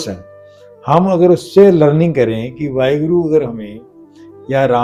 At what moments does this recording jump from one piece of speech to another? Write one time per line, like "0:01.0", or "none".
none